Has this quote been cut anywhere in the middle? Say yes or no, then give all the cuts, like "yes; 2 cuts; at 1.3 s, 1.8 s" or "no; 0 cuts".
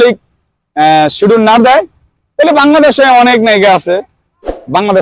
no; 0 cuts